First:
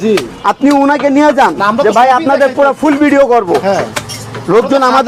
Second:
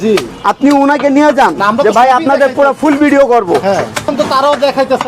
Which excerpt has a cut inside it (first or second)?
second